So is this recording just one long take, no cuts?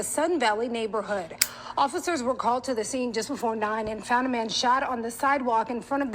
no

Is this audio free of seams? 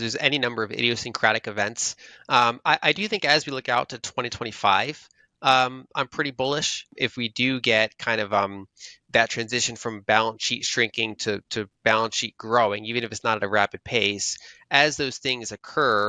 no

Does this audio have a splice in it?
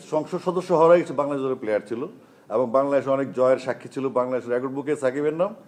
no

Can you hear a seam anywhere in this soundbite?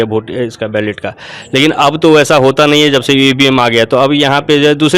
no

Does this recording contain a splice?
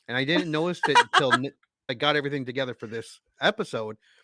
yes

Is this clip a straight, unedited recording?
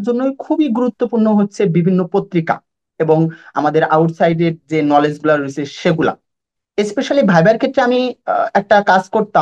yes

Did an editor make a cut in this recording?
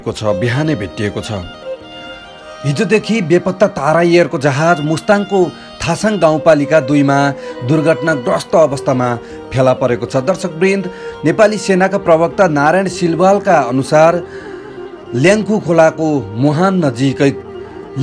no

